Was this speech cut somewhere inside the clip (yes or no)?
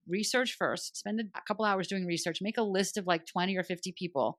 no